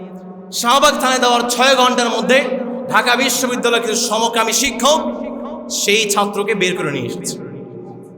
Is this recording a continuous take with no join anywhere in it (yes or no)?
yes